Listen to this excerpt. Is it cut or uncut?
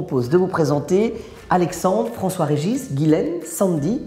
uncut